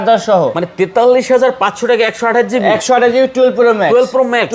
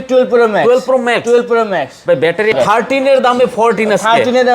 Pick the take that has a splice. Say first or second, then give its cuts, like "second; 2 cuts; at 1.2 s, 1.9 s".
second; 1 cut; at 2.5 s